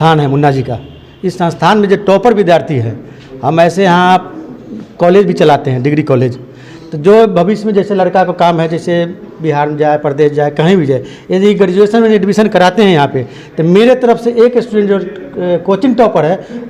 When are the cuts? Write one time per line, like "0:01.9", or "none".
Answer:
none